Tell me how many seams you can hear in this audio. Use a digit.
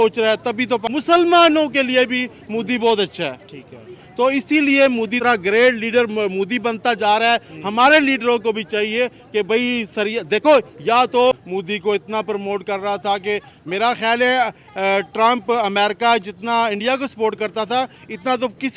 3